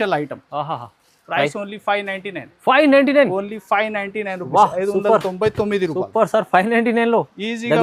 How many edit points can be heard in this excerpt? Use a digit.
0